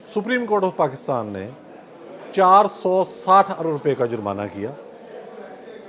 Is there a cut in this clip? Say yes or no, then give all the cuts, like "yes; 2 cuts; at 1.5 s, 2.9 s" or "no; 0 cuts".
no; 0 cuts